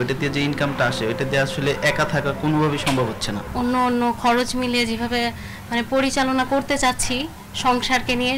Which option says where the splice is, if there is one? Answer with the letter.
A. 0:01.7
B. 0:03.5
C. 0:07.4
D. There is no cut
B